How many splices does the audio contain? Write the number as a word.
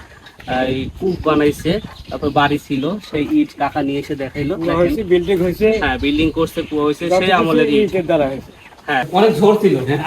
one